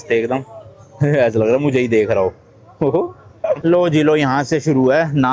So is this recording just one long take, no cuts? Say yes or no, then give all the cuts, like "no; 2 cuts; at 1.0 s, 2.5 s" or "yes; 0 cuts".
no; 1 cut; at 3.6 s